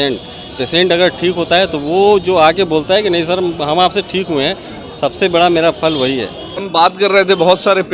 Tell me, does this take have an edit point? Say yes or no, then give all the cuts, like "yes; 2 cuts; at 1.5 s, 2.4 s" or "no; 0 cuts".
yes; 1 cut; at 6.6 s